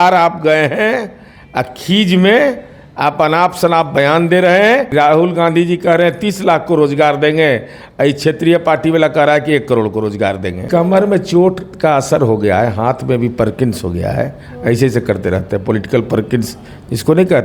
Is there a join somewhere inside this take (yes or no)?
yes